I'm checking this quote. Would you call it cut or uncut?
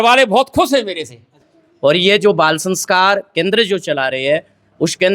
cut